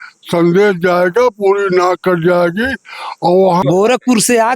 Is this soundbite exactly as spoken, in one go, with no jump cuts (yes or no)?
no